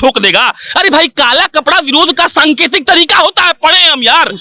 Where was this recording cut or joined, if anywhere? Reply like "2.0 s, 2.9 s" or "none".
none